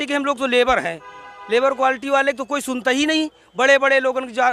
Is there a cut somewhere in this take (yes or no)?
no